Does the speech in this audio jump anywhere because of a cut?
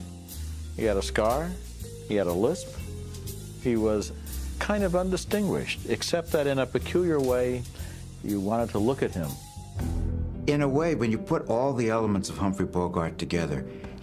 no; 0 cuts

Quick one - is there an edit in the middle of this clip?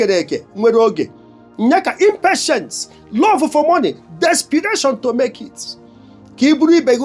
no; 0 cuts

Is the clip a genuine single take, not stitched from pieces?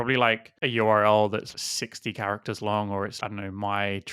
no; 2 cuts; at 1.5 s, 3.2 s

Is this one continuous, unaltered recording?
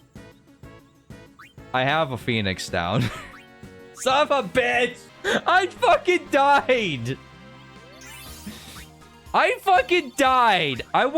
no; 1 cut; at 5.1 s

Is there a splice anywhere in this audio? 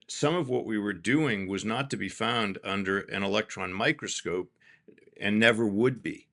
no; 0 cuts

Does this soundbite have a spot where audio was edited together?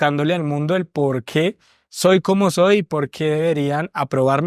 no; 0 cuts

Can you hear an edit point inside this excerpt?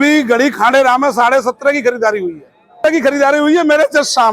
yes; 1 cut; at 2.8 s

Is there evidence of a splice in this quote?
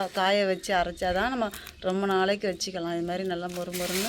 no; 0 cuts

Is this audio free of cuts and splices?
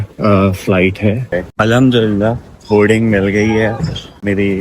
no; 1 cut; at 1.4 s

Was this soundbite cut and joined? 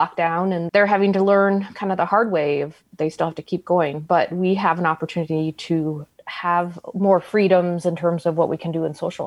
no; 0 cuts

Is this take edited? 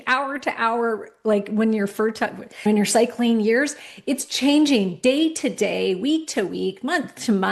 no; 0 cuts

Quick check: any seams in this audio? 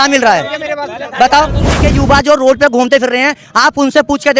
yes; 1 cut; at 1.8 s

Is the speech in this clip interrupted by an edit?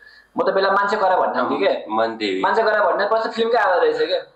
no; 0 cuts

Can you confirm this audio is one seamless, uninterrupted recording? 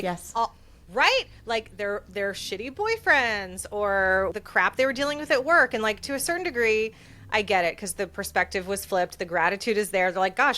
no; 1 cut; at 4.3 s

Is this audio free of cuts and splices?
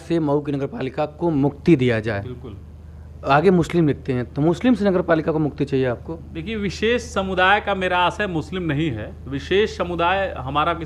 yes; 0 cuts

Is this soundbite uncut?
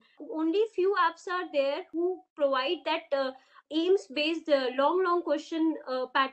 yes; 0 cuts

